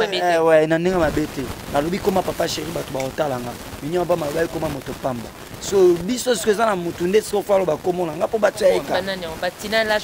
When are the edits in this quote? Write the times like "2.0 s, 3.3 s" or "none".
9.0 s